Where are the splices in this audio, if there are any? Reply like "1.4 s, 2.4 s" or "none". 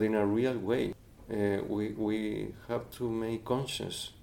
1.0 s